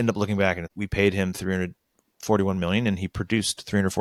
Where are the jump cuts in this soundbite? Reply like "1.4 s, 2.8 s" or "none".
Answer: none

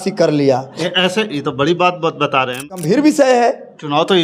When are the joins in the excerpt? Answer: 2.7 s

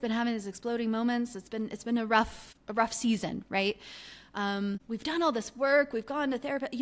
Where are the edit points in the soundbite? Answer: none

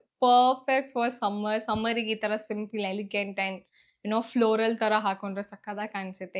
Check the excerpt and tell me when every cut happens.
none

